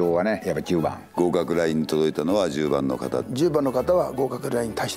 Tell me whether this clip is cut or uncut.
cut